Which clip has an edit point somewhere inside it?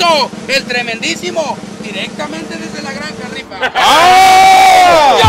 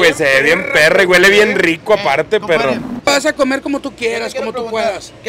second; 1 cut; at 3.1 s

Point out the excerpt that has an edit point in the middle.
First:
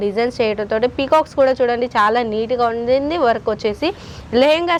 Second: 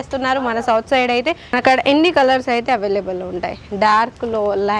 second; 1 cut; at 1.4 s

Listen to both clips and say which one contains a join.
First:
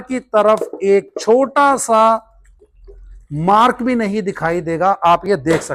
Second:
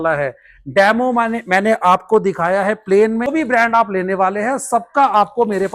second; 1 cut; at 3.3 s

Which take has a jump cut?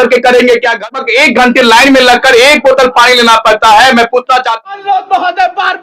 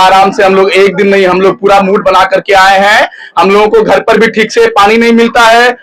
first; 2 cuts; at 0.9 s, 4.5 s

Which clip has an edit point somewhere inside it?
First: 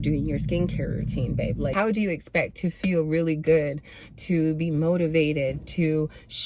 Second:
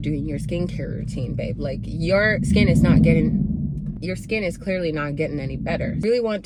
first; 1 cut; at 1.7 s

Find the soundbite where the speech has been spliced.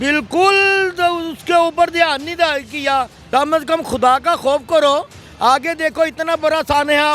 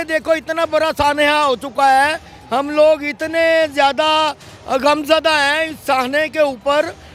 first; 1 cut; at 3.2 s

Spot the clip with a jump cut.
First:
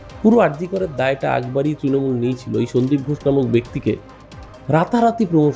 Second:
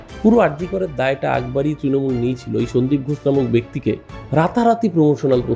second; 1 cut; at 4.1 s

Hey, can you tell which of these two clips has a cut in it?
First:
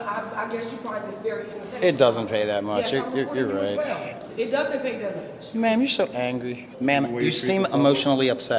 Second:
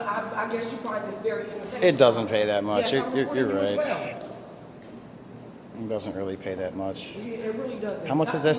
first; 2 cuts; at 4.3 s, 6.6 s

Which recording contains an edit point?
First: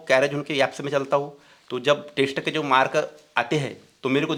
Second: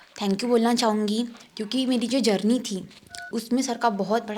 second; 1 cut; at 3.3 s

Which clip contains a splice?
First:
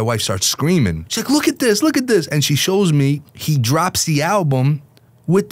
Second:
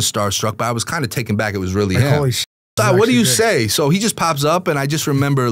first; 2 cuts; at 1.1 s, 3.3 s

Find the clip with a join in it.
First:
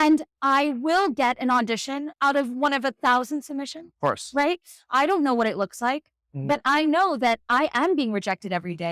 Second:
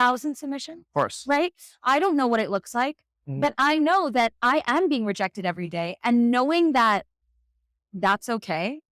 first; 1 cut; at 2.1 s

